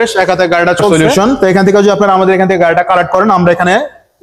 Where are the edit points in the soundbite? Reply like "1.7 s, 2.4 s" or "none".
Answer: 0.9 s